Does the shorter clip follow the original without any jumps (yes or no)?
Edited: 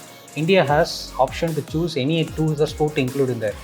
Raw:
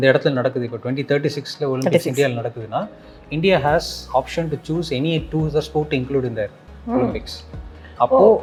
yes